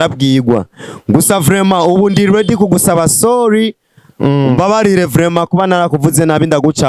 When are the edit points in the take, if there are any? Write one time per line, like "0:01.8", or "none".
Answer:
none